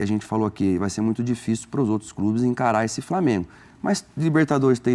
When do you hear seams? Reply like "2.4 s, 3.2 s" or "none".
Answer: none

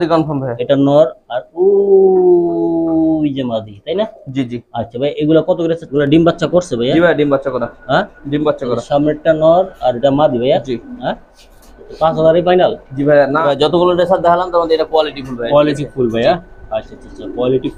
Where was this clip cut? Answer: 5.9 s, 13.4 s

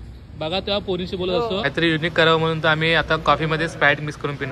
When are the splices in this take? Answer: 1.7 s

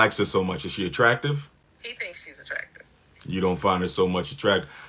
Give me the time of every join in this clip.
1.6 s

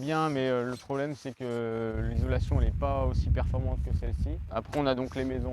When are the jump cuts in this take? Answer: 4.4 s

